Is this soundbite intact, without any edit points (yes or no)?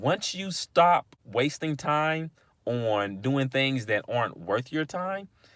no